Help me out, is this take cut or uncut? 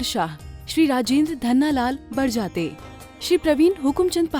uncut